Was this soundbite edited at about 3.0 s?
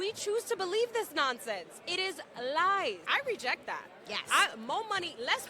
yes; 1 cut; at 3.0 s

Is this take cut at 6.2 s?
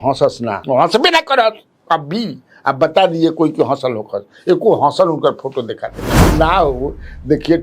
yes; 1 cut; at 6.2 s

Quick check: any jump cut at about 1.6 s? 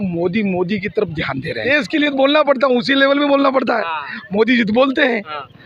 yes; 1 cut; at 1.6 s

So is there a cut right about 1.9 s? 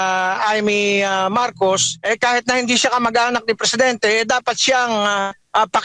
yes; 1 cut; at 1.9 s

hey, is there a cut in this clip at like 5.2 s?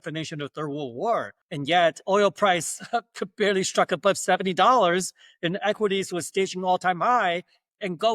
no; 1 cut; at 1.4 s

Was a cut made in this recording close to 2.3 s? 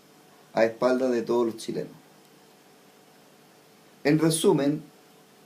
yes; 1 cut; at 2.3 s

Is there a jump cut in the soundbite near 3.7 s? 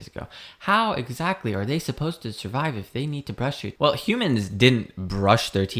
yes; 1 cut; at 3.7 s

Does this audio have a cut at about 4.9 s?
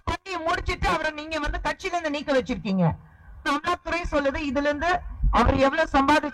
no; 1 cut; at 3.4 s

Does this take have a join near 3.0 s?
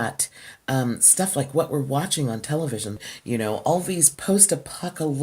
yes; 1 cut; at 3.0 s

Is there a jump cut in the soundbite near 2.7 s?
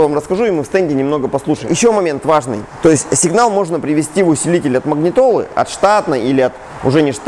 yes; 2 cuts; at 1.6 s, 2.7 s

